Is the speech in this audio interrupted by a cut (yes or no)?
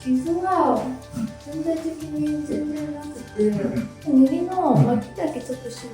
yes